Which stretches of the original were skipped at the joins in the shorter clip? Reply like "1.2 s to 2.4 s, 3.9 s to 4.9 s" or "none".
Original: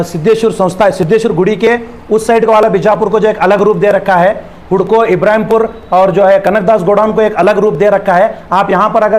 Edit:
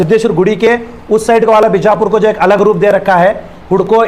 none